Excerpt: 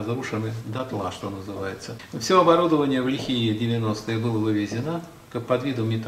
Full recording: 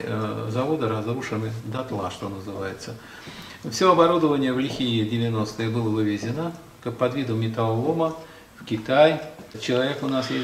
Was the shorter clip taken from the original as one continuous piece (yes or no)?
no